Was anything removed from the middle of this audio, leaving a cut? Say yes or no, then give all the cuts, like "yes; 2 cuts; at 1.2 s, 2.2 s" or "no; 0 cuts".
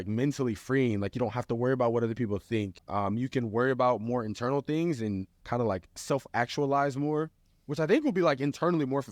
yes; 2 cuts; at 2.8 s, 5.3 s